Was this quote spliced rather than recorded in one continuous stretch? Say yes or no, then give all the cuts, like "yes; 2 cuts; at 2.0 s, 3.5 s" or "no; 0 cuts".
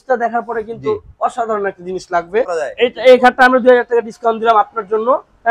yes; 1 cut; at 2.5 s